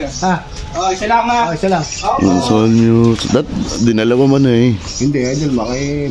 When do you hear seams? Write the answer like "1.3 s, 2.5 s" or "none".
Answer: none

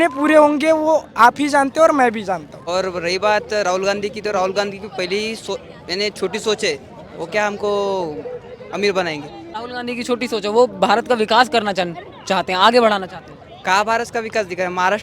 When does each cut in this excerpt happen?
2.5 s, 9.4 s

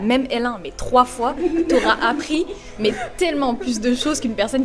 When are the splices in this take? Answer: none

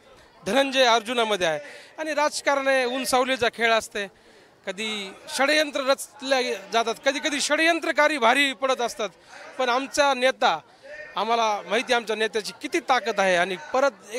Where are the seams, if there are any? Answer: none

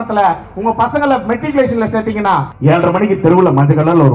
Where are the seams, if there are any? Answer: 2.5 s

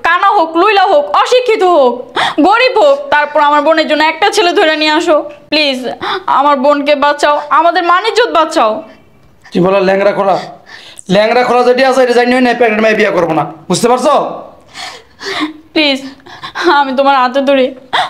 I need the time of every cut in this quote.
none

